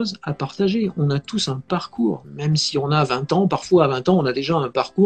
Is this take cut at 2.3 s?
yes; 1 cut; at 2.3 s

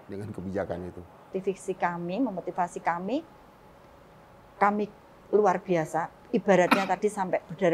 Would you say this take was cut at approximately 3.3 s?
no; 1 cut; at 1.4 s

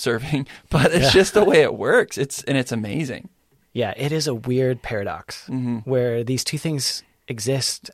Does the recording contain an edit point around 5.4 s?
no; 0 cuts

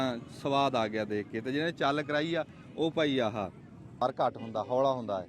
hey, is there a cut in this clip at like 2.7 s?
no; 1 cut; at 4.0 s

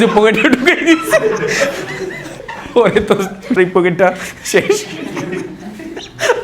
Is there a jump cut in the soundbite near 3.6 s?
yes; 2 cuts; at 2.5 s, 3.6 s

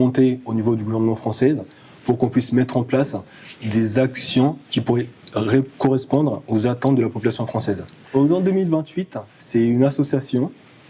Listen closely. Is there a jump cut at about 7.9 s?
yes; 1 cut; at 7.9 s

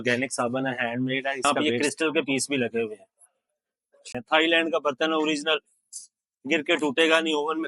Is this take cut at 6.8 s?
no; 2 cuts; at 1.4 s, 4.1 s

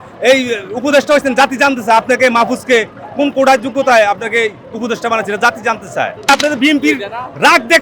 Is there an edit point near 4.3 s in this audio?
no; 1 cut; at 6.3 s

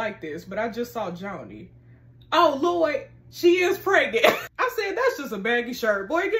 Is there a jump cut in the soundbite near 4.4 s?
yes; 1 cut; at 4.4 s

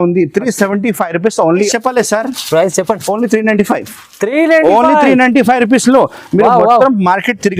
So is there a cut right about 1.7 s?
yes; 1 cut; at 1.7 s

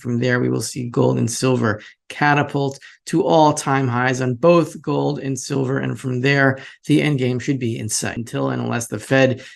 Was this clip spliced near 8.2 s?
yes; 1 cut; at 8.2 s

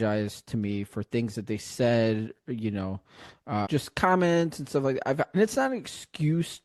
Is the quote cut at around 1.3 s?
no; 2 cuts; at 3.7 s, 5.3 s

